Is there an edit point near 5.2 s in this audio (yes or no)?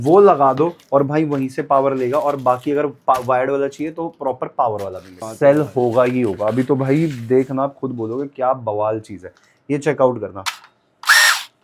yes